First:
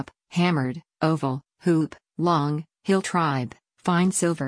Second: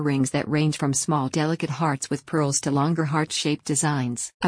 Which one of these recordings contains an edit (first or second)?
first